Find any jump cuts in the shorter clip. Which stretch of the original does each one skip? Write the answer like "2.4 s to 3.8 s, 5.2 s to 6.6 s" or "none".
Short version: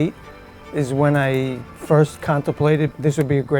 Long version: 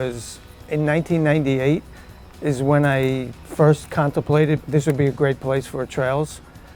none